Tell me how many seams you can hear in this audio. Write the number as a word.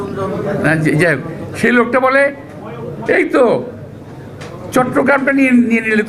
zero